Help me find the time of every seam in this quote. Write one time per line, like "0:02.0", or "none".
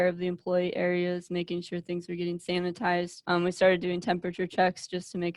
0:03.2